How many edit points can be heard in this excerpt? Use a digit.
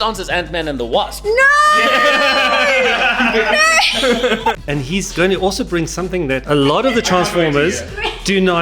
2